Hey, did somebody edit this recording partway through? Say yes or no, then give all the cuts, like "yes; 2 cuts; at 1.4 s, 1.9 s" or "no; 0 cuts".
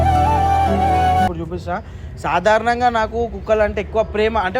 yes; 1 cut; at 1.3 s